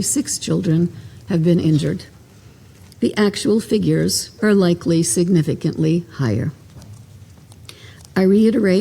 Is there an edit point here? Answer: no; 0 cuts

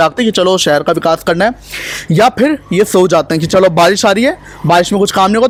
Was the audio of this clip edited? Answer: no; 0 cuts

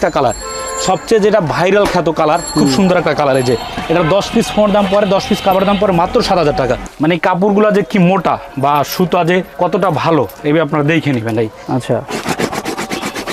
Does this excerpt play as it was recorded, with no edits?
no; 3 cuts; at 6.9 s, 8.5 s, 9.5 s

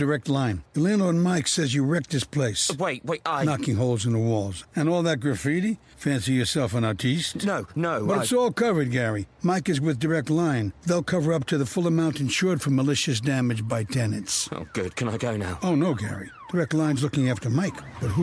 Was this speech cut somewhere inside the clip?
no; 0 cuts

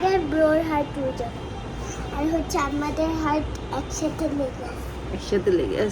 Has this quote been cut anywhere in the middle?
no; 0 cuts

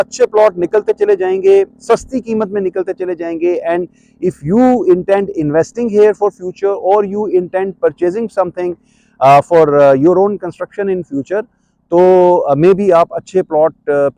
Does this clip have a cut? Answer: no; 0 cuts

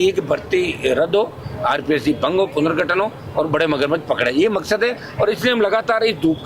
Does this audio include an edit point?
no; 0 cuts

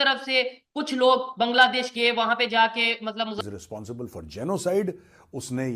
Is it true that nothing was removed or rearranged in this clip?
no; 1 cut; at 3.4 s

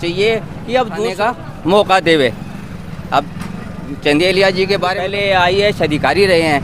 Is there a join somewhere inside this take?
yes; 2 cuts; at 1.1 s, 5.0 s

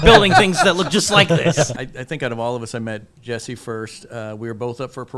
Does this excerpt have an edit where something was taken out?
yes; 1 cut; at 1.8 s

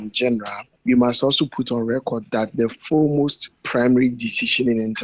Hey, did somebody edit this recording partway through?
yes; 1 cut; at 3.6 s

